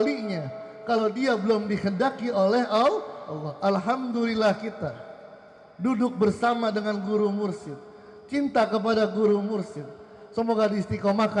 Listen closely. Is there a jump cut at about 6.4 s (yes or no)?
no